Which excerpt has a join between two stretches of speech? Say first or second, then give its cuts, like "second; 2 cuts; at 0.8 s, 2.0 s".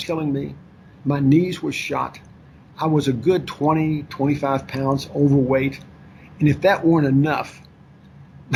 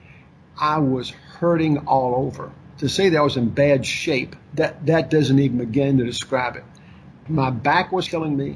second; 1 cut; at 7.1 s